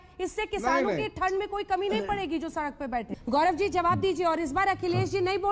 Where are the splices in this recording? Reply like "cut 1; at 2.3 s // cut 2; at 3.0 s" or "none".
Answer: cut 1; at 3.1 s